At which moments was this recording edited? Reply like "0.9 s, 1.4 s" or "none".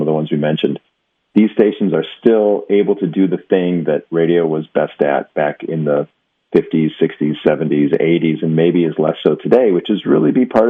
none